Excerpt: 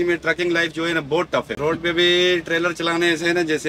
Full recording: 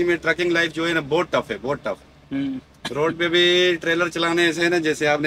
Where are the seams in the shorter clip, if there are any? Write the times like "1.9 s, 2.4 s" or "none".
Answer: 1.5 s